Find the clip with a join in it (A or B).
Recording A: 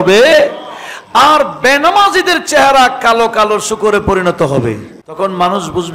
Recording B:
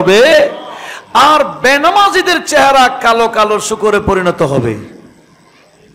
A